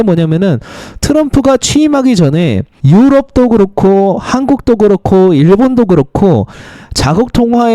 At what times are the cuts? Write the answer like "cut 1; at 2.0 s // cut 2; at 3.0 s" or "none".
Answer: cut 1; at 2.7 s